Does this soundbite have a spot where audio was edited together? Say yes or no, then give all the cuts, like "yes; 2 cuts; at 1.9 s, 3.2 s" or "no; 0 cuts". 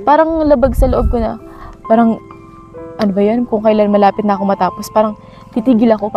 no; 0 cuts